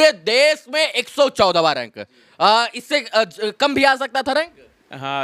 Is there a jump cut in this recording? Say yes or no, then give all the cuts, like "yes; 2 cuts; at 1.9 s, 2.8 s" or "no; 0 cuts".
no; 0 cuts